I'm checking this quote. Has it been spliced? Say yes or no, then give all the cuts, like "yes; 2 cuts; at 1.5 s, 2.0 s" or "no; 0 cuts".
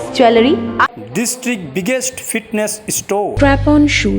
yes; 1 cut; at 0.9 s